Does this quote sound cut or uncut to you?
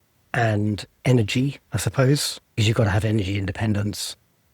cut